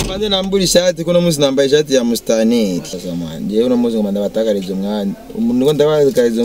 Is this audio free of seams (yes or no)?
no